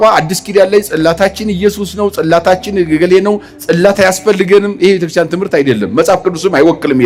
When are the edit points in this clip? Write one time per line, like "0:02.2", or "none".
none